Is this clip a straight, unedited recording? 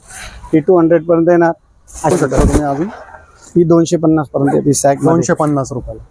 no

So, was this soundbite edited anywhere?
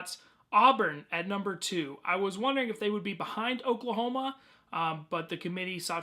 yes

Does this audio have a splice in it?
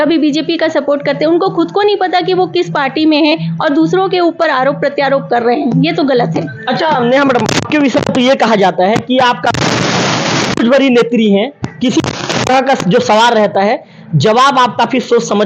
no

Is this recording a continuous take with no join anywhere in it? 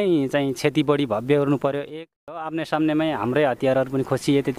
no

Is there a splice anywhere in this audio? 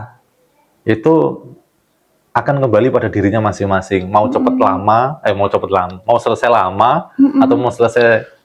no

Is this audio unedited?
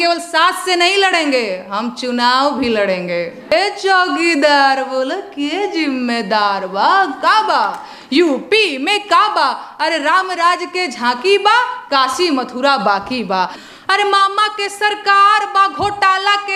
no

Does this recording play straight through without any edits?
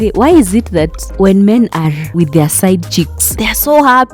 yes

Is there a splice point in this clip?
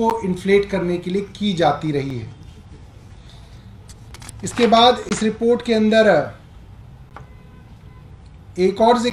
no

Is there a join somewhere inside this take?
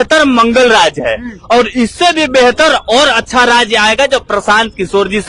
no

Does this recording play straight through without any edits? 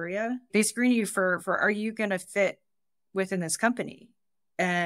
yes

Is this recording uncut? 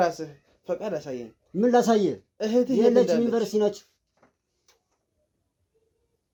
yes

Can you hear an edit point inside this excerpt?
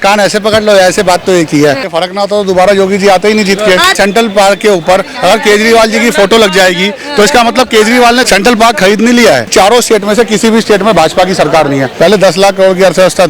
yes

